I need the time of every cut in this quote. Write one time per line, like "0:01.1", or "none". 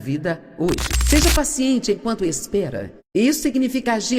0:00.9